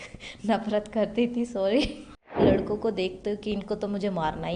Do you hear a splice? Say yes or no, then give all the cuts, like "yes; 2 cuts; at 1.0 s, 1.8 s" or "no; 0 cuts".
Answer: yes; 1 cut; at 2.3 s